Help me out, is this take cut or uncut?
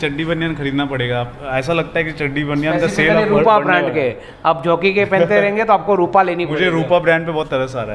uncut